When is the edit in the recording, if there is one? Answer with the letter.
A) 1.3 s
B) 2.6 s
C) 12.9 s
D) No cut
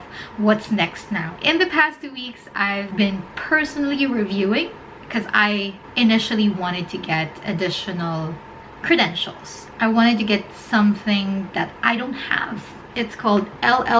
A